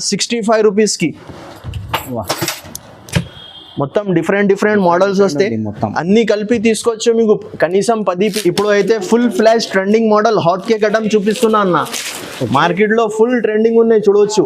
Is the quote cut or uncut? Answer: cut